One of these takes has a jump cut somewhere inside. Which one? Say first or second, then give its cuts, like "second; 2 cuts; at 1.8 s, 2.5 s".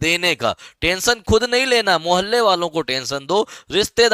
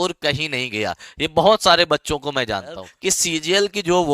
second; 1 cut; at 2.9 s